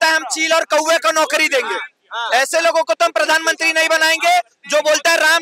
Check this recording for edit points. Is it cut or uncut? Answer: uncut